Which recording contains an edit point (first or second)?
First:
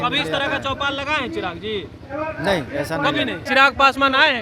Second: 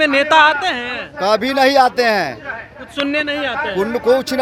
first